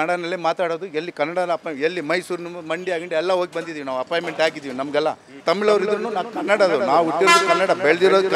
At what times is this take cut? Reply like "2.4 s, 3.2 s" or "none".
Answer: 5.4 s